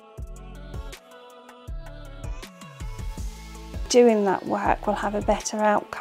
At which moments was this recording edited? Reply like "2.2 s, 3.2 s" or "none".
3.9 s